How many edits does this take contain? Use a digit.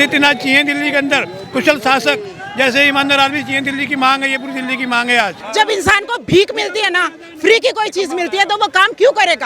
1